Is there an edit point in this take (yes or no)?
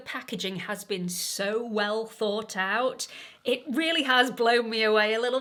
no